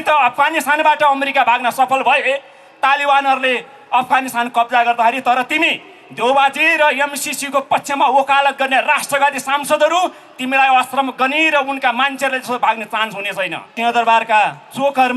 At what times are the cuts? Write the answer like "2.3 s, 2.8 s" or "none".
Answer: 13.6 s